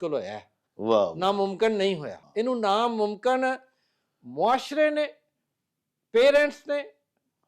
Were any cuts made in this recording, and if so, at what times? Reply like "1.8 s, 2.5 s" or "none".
2.2 s